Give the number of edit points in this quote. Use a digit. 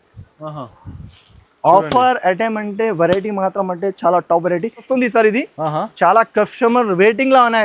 1